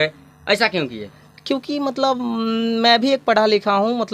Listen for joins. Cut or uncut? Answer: uncut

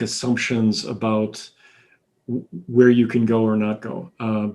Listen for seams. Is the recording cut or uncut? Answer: uncut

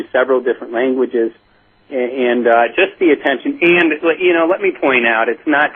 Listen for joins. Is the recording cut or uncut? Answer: cut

